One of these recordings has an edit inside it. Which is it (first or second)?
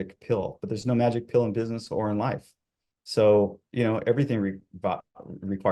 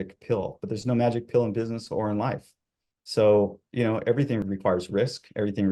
second